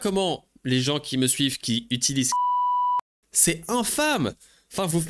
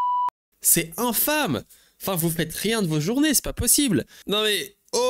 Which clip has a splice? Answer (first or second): second